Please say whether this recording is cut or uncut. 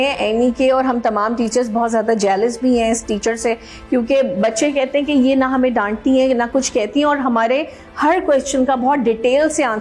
uncut